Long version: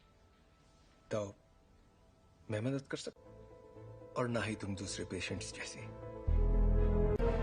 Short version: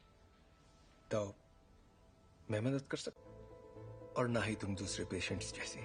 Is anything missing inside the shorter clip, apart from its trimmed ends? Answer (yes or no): no